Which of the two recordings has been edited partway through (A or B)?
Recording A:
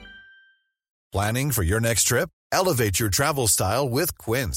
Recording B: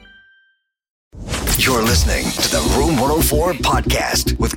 B